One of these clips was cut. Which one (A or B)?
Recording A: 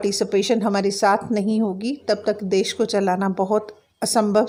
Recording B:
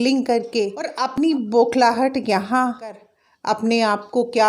B